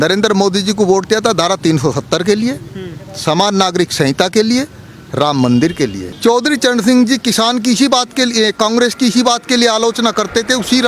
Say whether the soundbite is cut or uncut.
cut